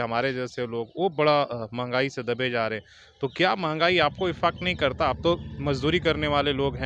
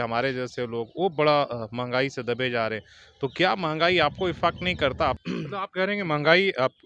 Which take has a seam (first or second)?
second